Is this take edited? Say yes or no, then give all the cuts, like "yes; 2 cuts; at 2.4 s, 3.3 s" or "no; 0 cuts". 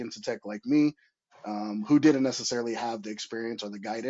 no; 0 cuts